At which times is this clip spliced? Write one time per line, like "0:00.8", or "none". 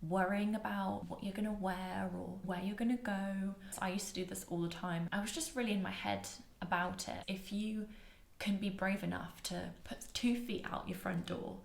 0:01.1
0:03.6